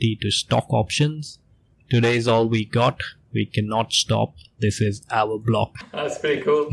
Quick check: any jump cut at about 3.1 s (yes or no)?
no